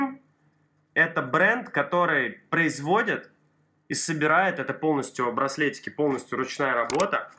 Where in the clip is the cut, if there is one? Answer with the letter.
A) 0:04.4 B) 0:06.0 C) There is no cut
C